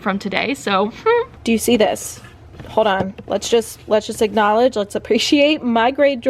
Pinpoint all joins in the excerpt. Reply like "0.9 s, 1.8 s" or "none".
1.4 s